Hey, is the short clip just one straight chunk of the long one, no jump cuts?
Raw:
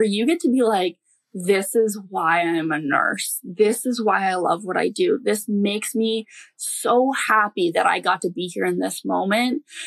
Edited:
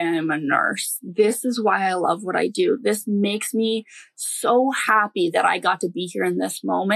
yes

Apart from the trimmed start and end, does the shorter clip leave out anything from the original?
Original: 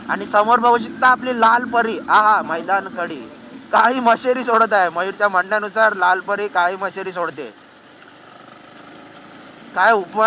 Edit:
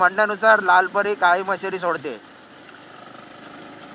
no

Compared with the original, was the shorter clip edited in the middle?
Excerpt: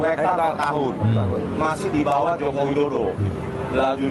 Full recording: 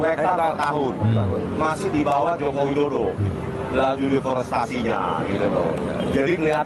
no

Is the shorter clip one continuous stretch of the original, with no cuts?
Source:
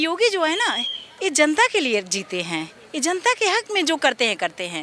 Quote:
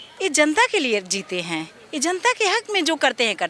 yes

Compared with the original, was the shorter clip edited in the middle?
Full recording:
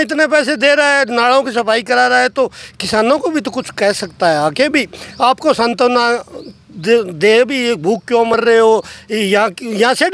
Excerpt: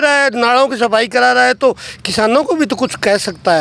no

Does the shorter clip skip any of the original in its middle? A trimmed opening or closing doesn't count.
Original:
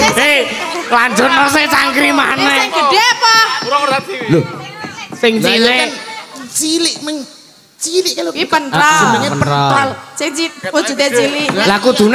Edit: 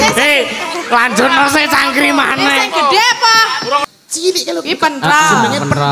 yes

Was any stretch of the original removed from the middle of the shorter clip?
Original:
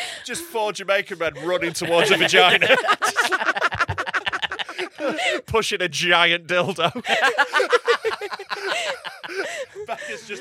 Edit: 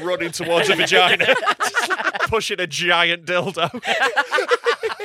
yes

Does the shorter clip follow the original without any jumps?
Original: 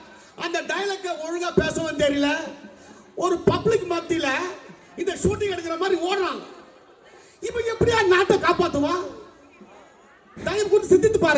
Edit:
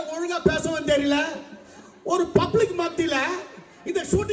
yes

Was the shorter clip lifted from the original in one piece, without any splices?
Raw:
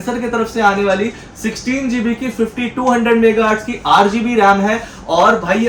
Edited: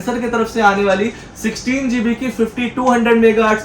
yes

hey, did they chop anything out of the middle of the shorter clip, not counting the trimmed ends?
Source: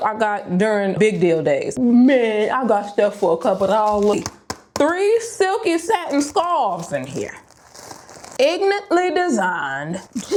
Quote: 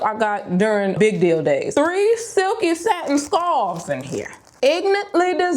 yes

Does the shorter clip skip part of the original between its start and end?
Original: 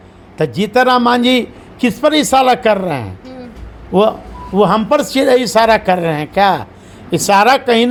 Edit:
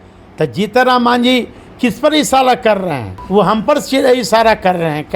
yes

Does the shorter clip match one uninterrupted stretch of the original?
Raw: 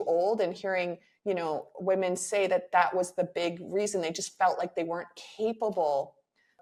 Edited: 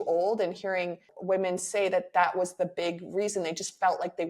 no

